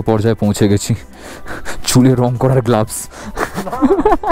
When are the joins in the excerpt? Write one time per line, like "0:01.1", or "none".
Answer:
none